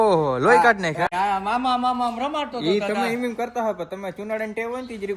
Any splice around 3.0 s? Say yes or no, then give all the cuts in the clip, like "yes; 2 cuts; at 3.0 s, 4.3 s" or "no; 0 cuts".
no; 1 cut; at 1.1 s